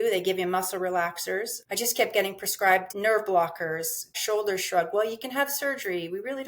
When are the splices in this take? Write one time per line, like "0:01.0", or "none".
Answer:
0:01.6
0:02.9
0:04.1